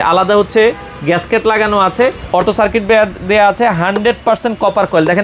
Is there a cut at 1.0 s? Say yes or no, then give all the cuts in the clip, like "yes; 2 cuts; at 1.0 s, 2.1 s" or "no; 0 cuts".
no; 1 cut; at 2.2 s